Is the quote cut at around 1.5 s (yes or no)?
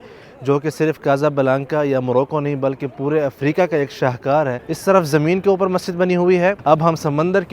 no